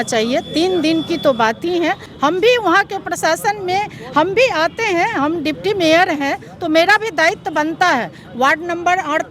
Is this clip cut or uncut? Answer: cut